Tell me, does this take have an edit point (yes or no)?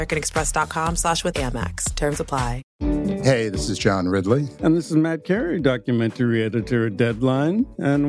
yes